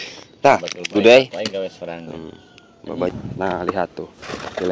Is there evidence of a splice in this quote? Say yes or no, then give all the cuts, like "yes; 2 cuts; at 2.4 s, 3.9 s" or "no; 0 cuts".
yes; 1 cut; at 3.2 s